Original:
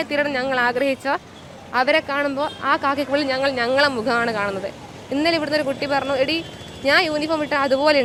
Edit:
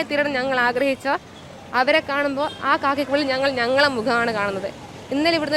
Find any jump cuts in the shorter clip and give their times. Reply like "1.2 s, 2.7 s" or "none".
none